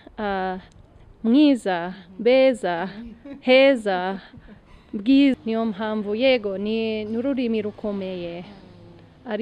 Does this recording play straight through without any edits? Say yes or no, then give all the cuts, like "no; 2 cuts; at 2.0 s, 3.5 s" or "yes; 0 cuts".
no; 1 cut; at 5.4 s